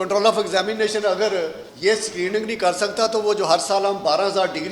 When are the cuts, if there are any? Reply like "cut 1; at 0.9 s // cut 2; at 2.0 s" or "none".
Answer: cut 1; at 1.6 s